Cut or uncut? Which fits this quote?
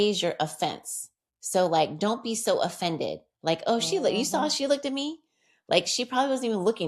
uncut